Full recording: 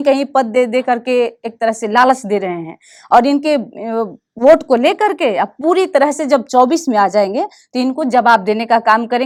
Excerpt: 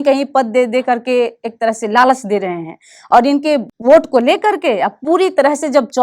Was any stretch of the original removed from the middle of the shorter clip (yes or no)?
yes